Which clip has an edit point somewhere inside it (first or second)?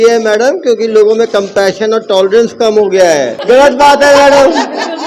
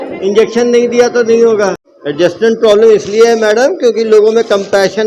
first